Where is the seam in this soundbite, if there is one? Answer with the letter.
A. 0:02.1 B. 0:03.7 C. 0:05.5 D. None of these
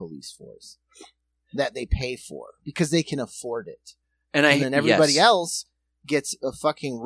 D